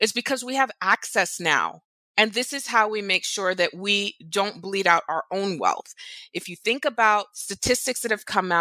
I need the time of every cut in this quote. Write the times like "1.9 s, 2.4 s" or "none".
none

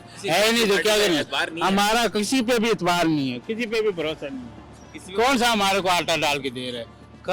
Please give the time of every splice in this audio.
none

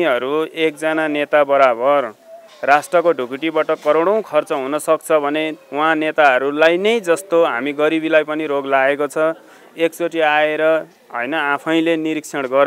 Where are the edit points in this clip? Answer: none

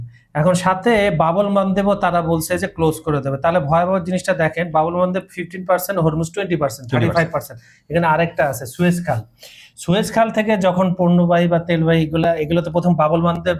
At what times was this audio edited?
none

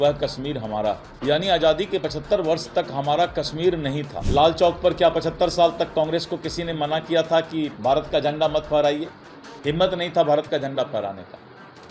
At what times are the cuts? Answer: 1.1 s, 4.2 s

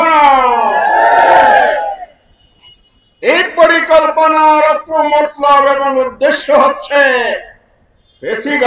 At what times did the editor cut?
none

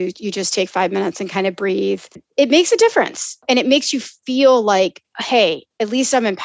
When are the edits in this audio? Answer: 2.2 s, 3.4 s

